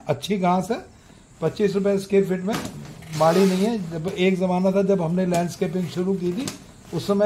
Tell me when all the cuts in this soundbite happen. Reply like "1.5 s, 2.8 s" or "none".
none